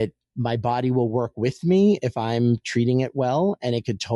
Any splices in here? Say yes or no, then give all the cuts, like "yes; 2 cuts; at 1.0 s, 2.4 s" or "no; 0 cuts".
no; 0 cuts